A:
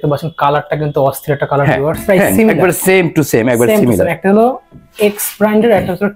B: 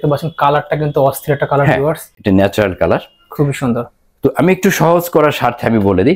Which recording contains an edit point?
A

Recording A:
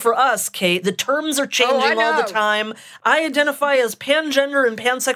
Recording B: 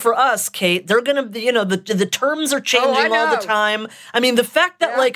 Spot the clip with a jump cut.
A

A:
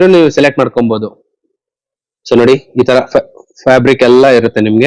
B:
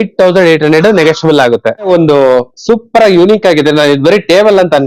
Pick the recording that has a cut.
B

